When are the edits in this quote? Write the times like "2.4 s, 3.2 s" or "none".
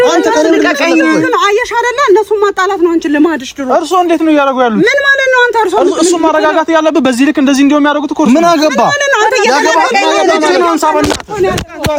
none